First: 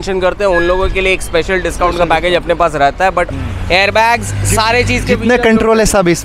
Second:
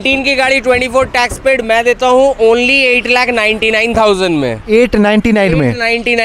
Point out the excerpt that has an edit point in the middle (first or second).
first